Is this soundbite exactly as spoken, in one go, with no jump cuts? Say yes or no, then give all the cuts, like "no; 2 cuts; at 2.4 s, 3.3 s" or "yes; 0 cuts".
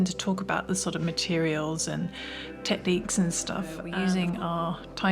no; 1 cut; at 3.8 s